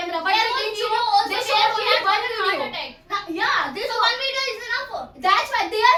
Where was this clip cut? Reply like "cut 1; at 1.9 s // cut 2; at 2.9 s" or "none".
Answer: none

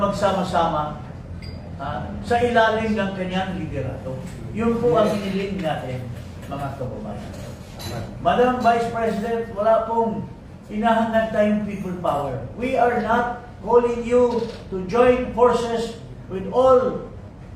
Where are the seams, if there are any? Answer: none

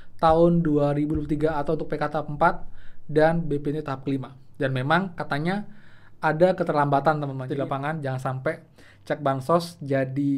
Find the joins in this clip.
cut 1; at 7.4 s

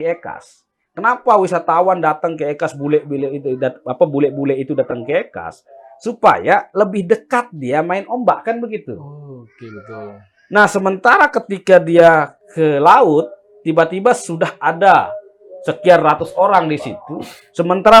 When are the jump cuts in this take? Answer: none

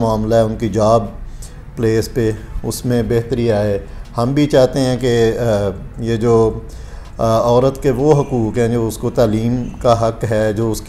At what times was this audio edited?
none

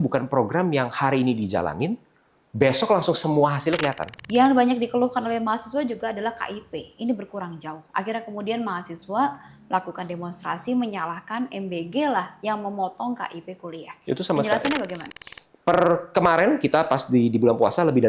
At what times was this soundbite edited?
cut 1; at 4.1 s // cut 2; at 15.0 s

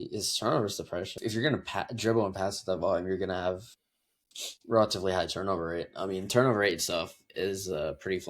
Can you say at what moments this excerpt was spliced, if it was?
cut 1; at 1.1 s

